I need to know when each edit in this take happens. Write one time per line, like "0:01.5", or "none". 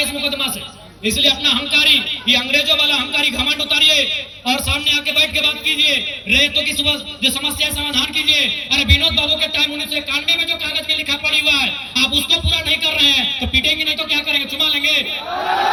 none